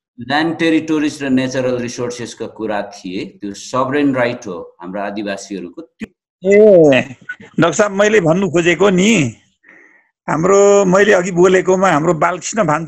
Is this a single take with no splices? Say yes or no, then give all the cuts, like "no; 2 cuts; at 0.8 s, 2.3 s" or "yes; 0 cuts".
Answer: no; 1 cut; at 5.9 s